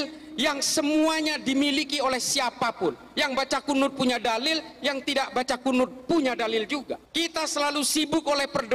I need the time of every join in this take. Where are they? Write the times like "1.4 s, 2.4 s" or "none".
7.0 s